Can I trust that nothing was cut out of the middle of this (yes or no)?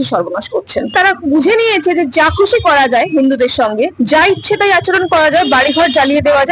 no